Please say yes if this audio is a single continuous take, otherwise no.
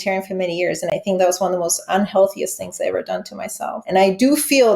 no